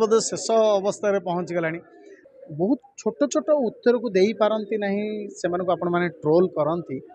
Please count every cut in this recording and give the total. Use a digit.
1